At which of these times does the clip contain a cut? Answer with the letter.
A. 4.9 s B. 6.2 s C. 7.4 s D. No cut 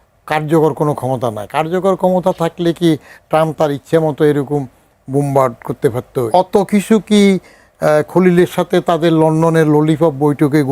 B